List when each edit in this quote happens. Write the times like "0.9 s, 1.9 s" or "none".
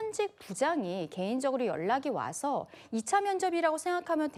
none